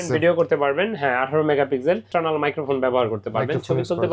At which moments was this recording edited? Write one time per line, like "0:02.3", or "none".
0:02.1